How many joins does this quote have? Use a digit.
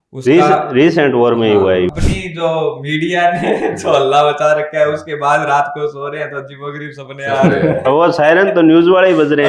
1